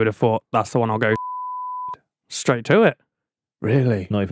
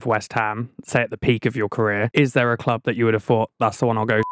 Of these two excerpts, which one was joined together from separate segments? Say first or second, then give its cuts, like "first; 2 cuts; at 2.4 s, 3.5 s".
second; 1 cut; at 2.1 s